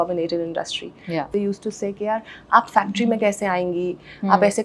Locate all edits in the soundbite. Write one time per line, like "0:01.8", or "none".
0:01.3